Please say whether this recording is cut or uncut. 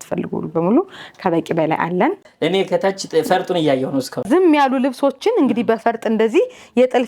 cut